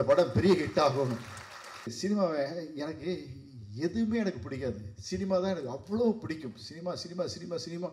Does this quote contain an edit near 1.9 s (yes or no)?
yes